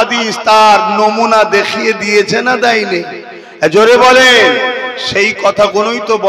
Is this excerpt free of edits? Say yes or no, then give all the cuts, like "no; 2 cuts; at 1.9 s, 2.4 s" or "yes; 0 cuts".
yes; 0 cuts